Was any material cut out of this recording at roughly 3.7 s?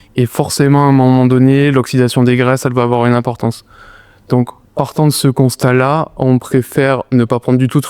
no; 0 cuts

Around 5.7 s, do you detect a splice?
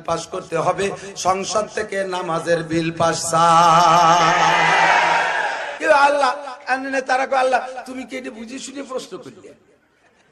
yes; 1 cut; at 5.7 s

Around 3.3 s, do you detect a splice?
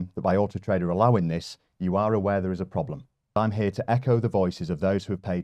yes; 1 cut; at 3.3 s

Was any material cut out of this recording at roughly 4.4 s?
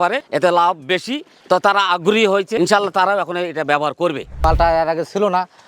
yes; 1 cut; at 4.4 s

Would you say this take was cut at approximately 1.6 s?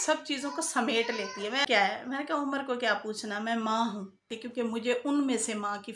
yes; 2 cuts; at 1.6 s, 4.4 s

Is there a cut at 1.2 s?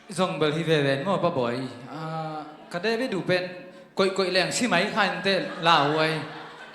yes; 1 cut; at 1.2 s

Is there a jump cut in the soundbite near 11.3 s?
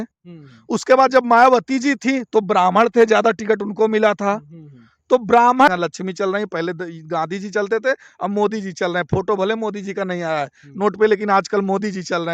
no; 1 cut; at 5.7 s

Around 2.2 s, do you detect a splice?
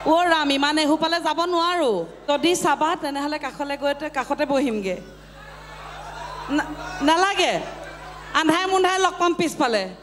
yes; 1 cut; at 2.2 s

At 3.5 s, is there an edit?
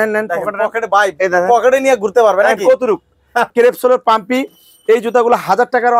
yes; 1 cut; at 3.5 s

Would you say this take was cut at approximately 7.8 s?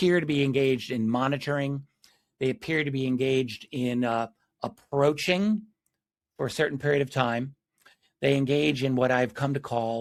no; 0 cuts

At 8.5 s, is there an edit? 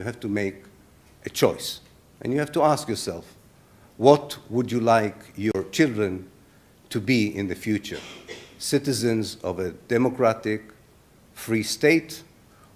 no; 0 cuts

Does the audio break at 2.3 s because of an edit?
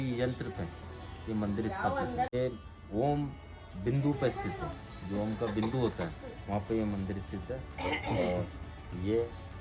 yes; 1 cut; at 2.3 s

